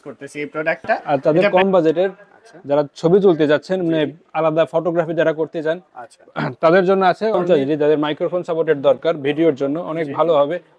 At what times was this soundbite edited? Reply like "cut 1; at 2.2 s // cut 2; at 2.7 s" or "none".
cut 1; at 1.0 s // cut 2; at 7.4 s